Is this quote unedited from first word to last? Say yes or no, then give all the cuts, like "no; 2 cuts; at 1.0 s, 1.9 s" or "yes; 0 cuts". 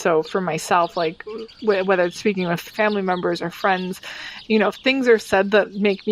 no; 1 cut; at 2.6 s